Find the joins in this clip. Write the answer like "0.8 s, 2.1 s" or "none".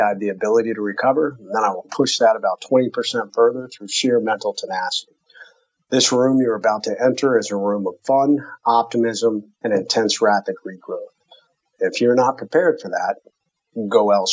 none